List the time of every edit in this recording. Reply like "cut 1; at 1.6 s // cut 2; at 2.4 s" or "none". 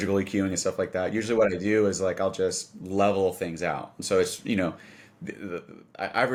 none